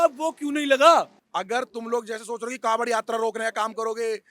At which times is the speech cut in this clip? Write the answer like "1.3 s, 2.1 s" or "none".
1.2 s